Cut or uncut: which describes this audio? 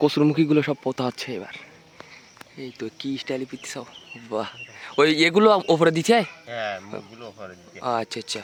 uncut